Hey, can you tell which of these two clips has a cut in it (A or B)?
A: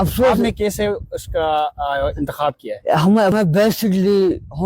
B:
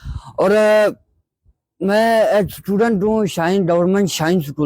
A